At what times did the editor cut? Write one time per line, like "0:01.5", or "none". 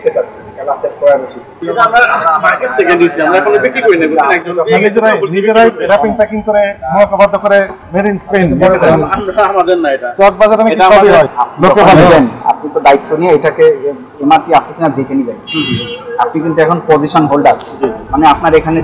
0:01.5
0:11.4

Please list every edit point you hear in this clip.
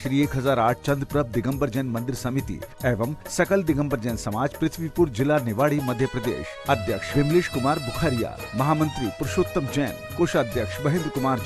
none

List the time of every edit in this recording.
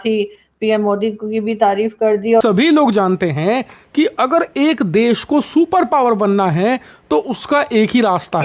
0:02.4

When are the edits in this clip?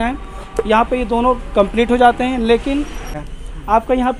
0:03.1

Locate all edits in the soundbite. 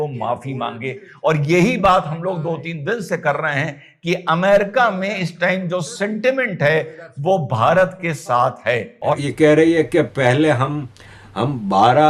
0:09.2
0:11.0

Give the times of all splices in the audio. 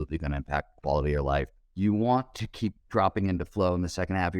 0:01.6

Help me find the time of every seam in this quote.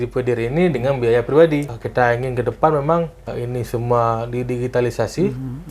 0:01.7
0:03.2

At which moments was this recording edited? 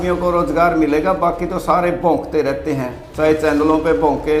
none

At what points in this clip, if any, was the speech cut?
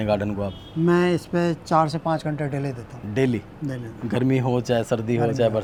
none

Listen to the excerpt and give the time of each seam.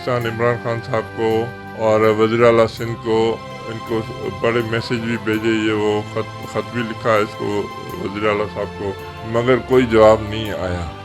none

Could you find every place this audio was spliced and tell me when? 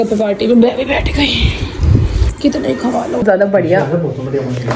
0:03.2

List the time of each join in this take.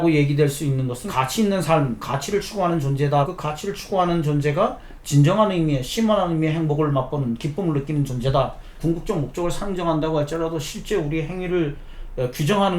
0:01.0
0:03.2
0:08.8

